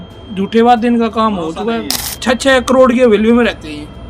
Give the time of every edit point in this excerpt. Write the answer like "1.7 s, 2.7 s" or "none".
2.0 s